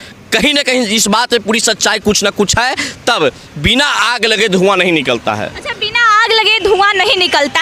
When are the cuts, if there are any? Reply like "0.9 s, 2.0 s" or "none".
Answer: none